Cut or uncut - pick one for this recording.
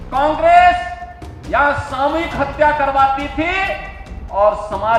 uncut